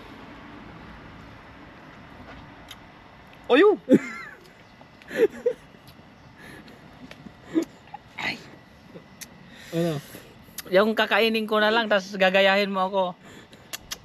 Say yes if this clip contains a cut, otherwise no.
no